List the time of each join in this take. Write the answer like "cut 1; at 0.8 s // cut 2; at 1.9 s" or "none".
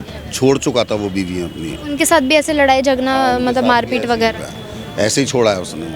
none